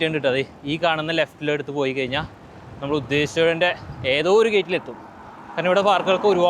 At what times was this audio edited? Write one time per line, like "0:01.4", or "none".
none